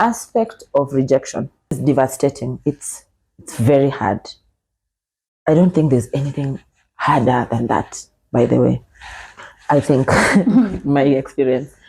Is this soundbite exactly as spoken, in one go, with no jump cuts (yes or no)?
no